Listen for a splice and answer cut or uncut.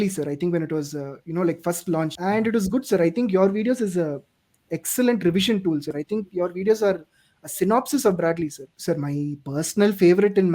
cut